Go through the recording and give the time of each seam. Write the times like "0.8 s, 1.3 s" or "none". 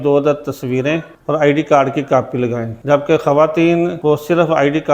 1.1 s, 2.7 s, 4.0 s

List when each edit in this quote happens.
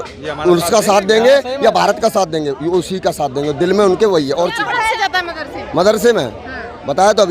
4.9 s

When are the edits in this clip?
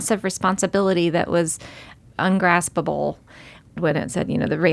2.0 s, 3.8 s

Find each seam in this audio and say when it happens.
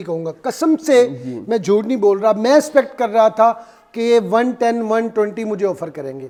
none

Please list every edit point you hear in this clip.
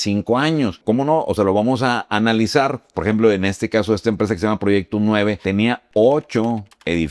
0.8 s, 2.9 s, 5.4 s

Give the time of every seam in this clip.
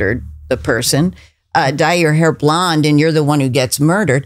none

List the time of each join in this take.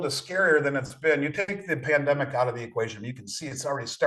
none

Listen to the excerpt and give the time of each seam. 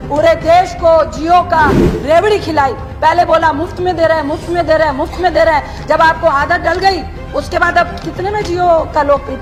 none

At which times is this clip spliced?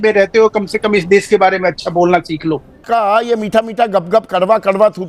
2.8 s

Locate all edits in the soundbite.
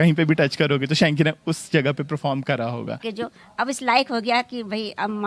3.1 s

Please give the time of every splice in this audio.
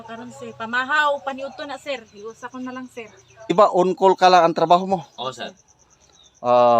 3.5 s

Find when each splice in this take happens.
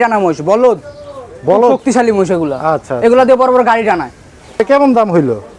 4.6 s

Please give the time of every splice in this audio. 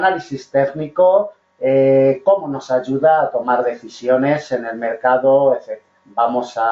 3.9 s

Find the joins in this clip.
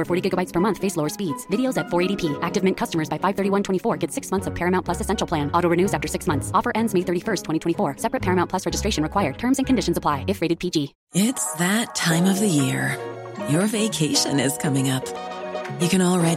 11.0 s

